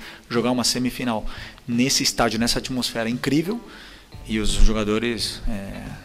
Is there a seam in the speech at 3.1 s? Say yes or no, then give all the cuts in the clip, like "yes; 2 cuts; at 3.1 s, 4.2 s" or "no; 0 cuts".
no; 0 cuts